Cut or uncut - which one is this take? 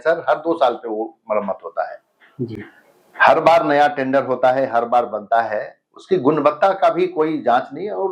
uncut